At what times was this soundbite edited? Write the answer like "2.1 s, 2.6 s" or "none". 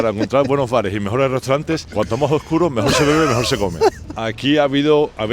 1.9 s, 4.1 s